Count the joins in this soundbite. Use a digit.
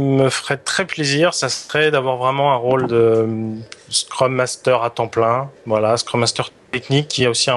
0